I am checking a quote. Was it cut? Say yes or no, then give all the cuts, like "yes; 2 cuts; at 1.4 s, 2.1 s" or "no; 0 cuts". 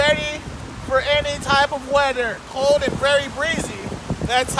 yes; 1 cut; at 2.5 s